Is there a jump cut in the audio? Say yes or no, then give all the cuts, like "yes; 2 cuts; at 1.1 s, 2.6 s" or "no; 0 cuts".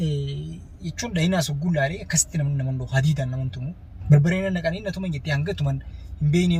no; 0 cuts